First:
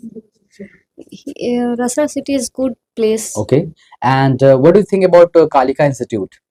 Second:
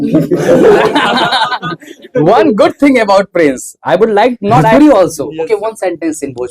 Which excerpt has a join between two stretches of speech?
second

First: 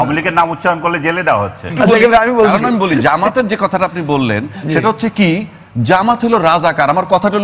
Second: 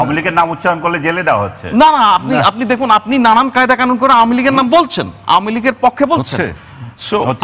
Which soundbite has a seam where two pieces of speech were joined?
first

